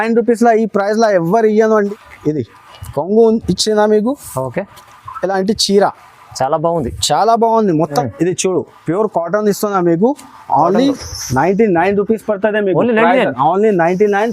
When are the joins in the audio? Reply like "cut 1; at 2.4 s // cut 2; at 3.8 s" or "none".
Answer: cut 1; at 1.9 s // cut 2; at 8.0 s